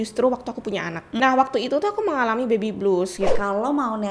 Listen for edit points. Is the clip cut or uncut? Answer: cut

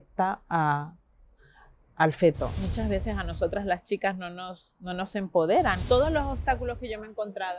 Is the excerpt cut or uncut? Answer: cut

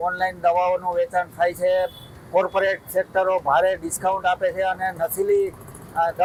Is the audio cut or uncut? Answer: uncut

